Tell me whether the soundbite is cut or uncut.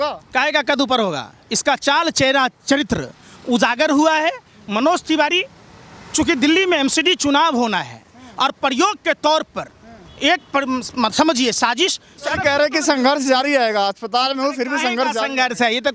uncut